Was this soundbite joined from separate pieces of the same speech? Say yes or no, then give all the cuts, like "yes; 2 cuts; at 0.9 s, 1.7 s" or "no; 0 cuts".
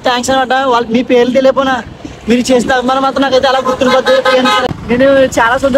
yes; 1 cut; at 4.7 s